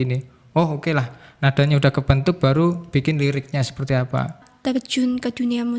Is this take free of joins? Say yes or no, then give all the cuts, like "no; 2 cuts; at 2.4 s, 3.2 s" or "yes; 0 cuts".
no; 1 cut; at 4.5 s